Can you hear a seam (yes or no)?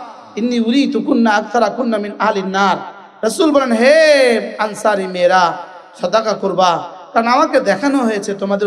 no